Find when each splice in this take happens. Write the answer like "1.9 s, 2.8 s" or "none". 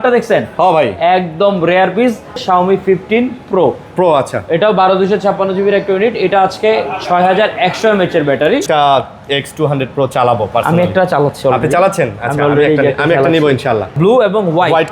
2.4 s, 8.6 s, 13.9 s